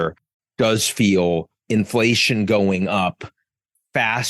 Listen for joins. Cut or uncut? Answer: cut